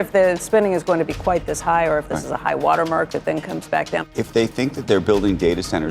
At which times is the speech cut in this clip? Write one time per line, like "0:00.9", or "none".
0:04.1